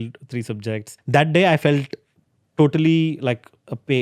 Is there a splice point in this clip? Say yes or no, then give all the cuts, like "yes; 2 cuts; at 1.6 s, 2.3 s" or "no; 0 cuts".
yes; 1 cut; at 0.9 s